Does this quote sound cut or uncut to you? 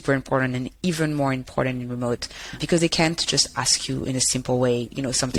uncut